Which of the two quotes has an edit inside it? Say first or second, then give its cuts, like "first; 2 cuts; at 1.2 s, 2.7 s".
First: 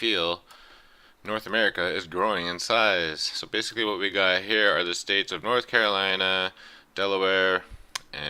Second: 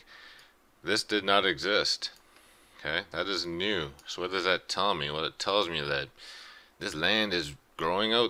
first; 1 cut; at 1.9 s